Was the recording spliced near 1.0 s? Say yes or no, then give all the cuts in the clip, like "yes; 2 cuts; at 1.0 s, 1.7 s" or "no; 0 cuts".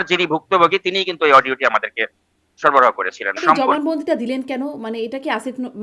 no; 1 cut; at 3.4 s